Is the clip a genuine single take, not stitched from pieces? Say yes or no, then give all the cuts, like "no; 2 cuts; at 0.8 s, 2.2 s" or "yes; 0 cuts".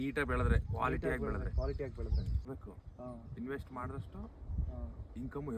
no; 1 cut; at 2.5 s